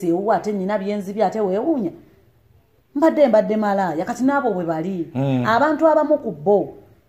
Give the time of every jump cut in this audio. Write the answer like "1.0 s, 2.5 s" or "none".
none